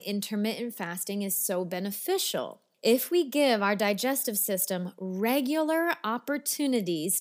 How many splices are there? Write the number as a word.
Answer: one